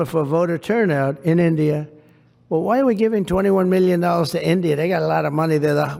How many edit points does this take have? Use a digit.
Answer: 0